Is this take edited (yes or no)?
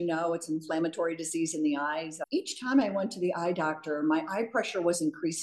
yes